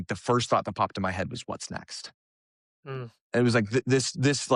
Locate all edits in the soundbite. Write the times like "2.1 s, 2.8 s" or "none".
none